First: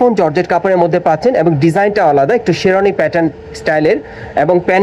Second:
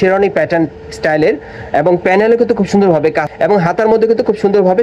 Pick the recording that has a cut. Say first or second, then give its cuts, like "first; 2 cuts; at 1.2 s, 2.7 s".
second; 1 cut; at 3.2 s